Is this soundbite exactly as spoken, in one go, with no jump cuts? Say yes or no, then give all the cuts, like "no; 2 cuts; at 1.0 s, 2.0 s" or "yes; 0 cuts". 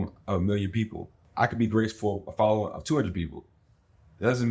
no; 1 cut; at 1.2 s